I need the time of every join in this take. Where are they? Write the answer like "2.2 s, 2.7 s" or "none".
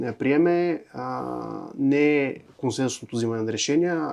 none